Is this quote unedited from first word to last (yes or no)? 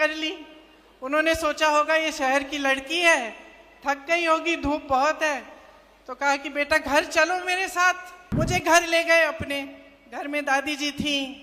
no